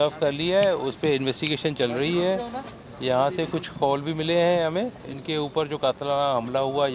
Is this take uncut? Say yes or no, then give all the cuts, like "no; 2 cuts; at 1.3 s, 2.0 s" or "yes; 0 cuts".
yes; 0 cuts